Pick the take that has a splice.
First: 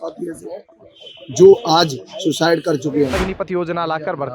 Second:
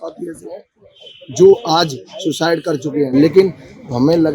first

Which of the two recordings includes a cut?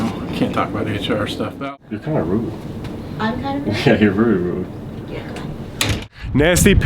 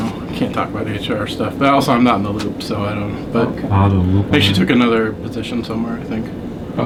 first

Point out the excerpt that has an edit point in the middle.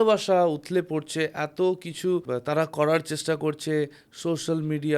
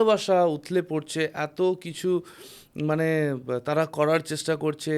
first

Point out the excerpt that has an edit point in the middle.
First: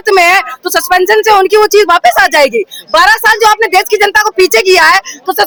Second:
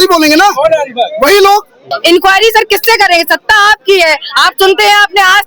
second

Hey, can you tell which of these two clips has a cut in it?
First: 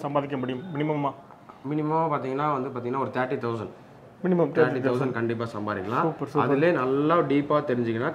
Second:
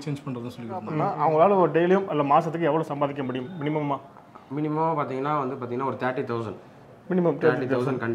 second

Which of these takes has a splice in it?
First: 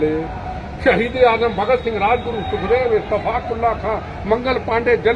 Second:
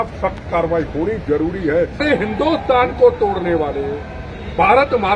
second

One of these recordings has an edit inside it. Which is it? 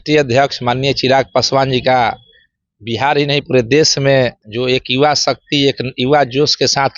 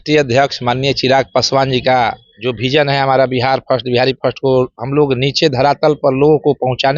second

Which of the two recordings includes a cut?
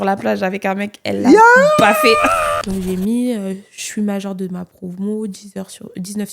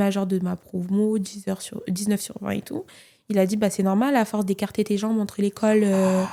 first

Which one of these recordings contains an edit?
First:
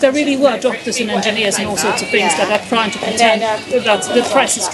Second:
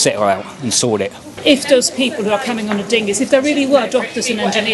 second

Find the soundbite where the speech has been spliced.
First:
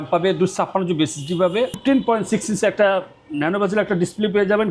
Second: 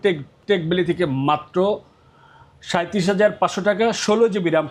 first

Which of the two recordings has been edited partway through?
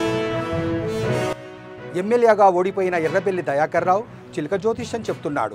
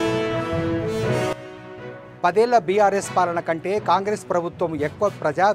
second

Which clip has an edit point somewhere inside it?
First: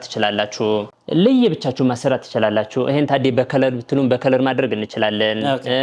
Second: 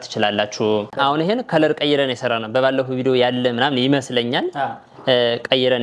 second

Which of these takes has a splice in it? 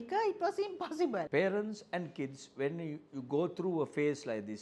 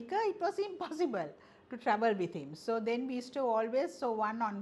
first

